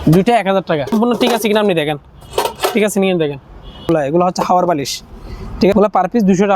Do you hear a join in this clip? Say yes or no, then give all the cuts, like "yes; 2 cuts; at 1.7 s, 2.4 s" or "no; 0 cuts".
yes; 3 cuts; at 0.9 s, 3.9 s, 5.7 s